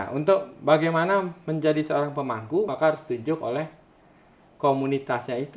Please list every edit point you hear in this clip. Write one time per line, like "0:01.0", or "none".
0:02.7